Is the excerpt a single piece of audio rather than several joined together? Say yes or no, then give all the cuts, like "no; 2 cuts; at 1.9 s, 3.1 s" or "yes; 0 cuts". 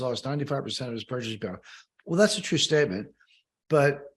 yes; 0 cuts